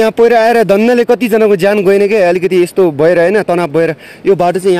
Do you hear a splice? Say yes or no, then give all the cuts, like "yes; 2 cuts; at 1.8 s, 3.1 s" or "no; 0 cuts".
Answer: no; 0 cuts